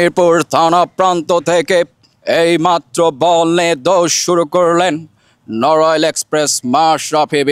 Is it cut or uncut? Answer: uncut